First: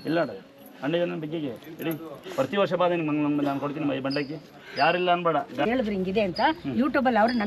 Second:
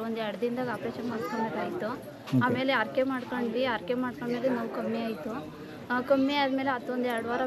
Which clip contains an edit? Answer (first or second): first